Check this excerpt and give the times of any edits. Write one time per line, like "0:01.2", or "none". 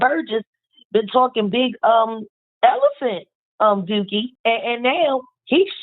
0:02.5
0:04.3

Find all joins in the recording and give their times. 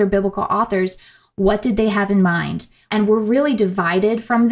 0:02.8

